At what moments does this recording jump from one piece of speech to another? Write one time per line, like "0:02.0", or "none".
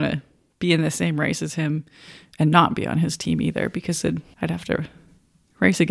0:04.3